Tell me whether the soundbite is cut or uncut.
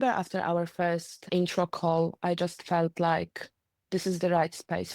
cut